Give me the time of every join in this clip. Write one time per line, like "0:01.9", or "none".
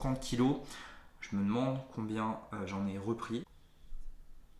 0:03.5